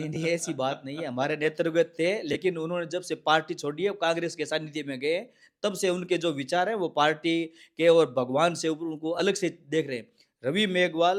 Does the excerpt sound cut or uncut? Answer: uncut